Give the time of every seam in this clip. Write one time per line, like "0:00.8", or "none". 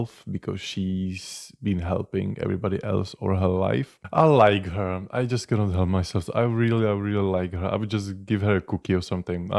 0:04.0